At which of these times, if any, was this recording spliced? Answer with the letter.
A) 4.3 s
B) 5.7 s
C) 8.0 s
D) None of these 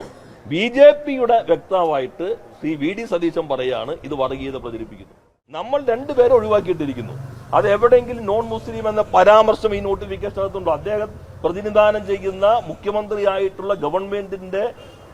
B